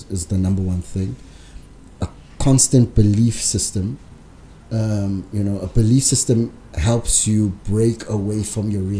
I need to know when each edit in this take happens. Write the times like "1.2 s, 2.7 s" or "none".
none